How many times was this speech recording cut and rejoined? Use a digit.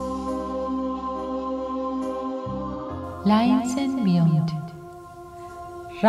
0